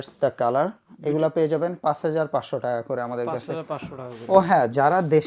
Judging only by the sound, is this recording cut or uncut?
uncut